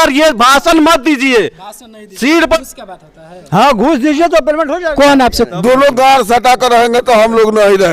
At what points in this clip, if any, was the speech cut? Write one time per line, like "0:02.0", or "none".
0:02.6
0:05.5